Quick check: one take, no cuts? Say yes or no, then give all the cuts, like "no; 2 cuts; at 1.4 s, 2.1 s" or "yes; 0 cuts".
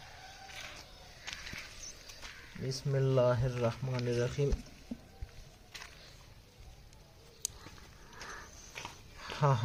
yes; 0 cuts